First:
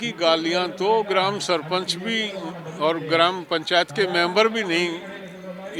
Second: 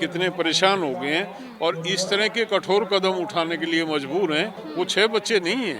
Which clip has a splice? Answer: second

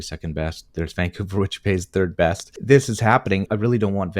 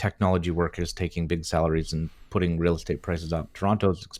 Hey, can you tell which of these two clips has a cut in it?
first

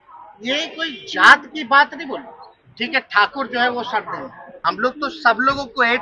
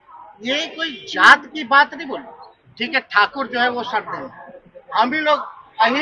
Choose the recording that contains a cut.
first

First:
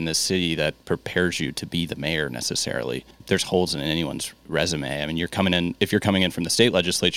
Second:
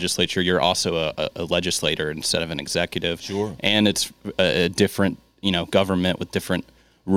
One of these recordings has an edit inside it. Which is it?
first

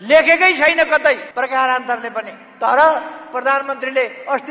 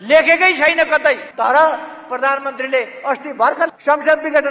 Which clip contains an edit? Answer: second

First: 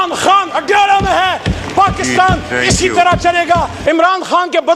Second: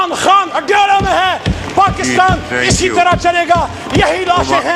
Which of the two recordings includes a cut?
first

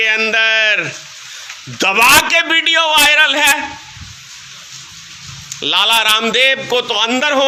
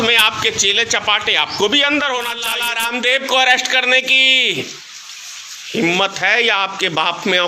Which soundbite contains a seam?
second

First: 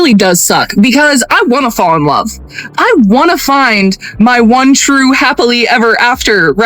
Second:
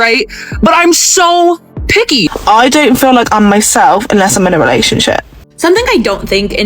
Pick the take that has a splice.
second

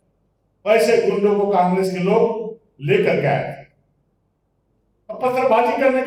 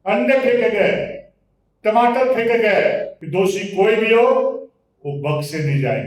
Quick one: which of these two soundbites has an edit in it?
second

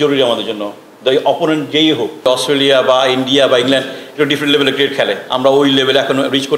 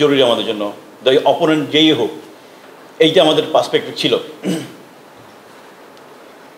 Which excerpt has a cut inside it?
first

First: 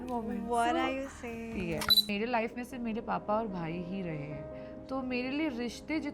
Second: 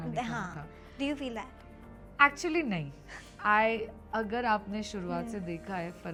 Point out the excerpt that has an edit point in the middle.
first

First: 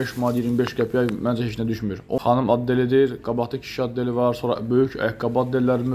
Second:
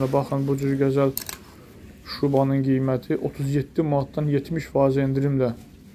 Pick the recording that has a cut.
first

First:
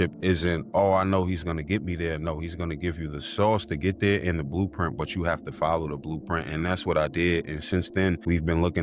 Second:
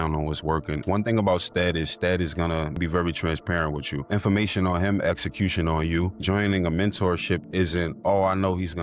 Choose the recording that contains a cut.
second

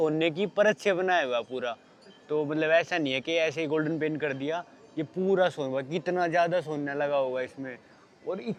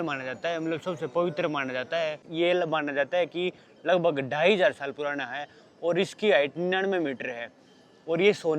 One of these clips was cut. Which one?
second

